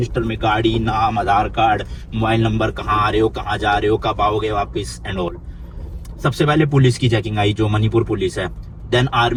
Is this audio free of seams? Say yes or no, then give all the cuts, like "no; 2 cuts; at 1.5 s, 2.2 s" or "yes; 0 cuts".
yes; 0 cuts